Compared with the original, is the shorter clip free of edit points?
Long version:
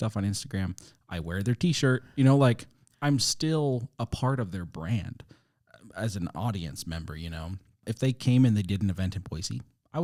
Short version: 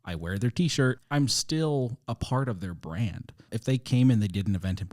no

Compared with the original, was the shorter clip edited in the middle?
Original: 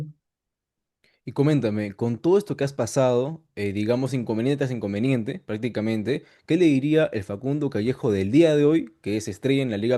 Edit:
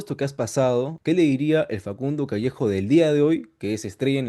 yes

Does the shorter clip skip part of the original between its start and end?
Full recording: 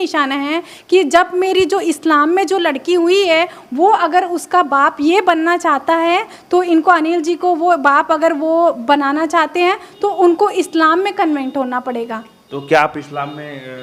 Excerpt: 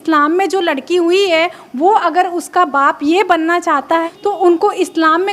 yes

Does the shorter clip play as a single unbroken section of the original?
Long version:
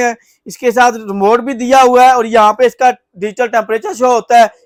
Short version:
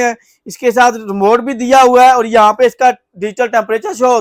yes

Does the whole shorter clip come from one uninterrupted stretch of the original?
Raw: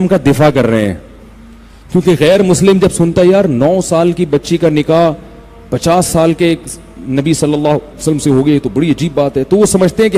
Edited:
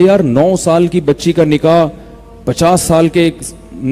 yes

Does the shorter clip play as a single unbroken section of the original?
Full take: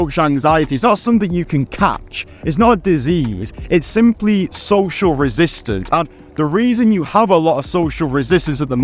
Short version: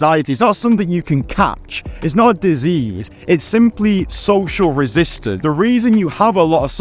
no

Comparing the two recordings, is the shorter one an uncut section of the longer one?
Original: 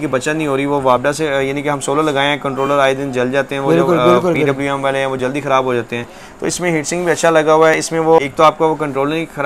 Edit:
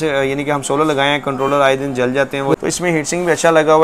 no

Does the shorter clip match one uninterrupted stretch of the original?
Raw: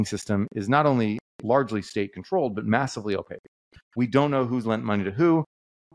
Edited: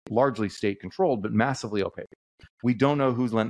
yes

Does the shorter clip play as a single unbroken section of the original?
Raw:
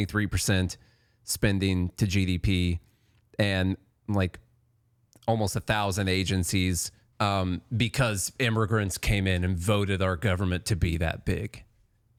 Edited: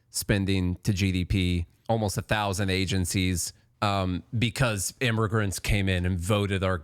no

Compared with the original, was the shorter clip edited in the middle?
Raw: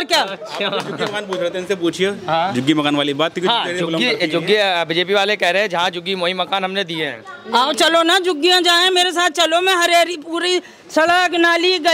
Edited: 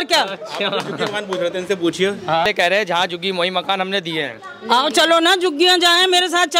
yes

